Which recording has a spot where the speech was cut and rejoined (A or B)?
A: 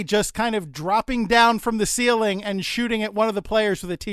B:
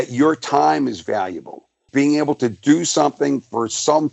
B